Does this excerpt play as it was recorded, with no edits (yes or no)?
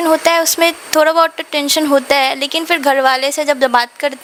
yes